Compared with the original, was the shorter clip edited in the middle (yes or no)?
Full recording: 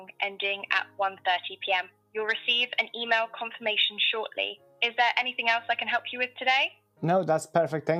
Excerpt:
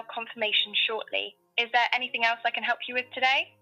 no